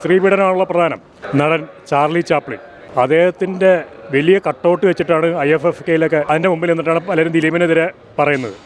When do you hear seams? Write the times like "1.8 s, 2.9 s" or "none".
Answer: 1.2 s